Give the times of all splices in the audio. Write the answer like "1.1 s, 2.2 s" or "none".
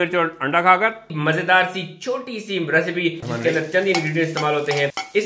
1.1 s, 3.2 s

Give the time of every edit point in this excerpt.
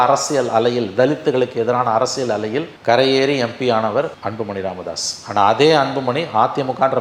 none

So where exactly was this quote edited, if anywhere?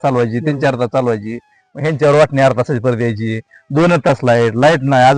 none

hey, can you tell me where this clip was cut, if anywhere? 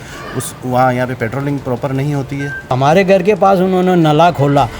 2.7 s

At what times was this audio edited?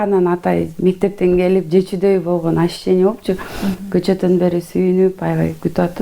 none

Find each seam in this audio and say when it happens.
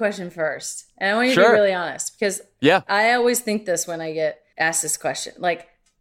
4.5 s

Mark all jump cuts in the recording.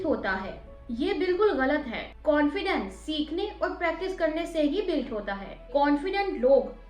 5.7 s

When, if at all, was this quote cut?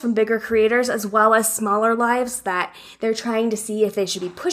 none

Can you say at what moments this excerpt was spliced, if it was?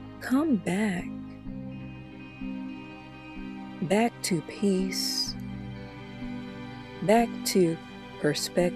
none

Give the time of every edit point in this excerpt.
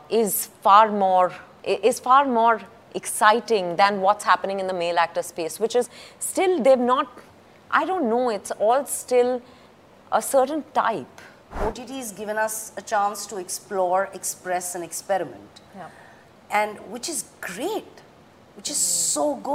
1.5 s, 11.6 s

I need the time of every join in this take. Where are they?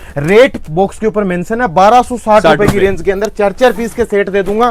none

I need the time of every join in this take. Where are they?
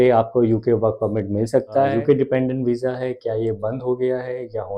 1.9 s

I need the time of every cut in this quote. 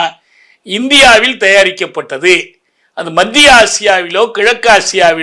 none

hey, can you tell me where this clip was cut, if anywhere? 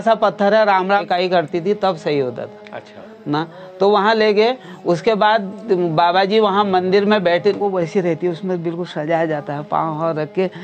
1.0 s, 7.7 s

